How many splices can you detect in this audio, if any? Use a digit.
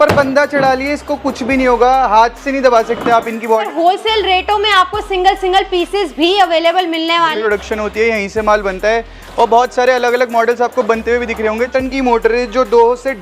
3